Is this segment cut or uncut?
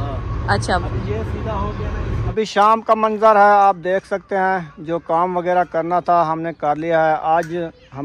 cut